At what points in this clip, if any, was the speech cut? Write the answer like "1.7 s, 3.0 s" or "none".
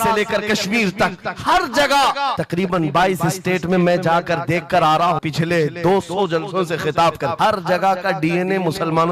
2.4 s, 5.2 s, 7.3 s

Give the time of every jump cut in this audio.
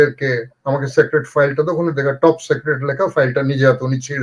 none

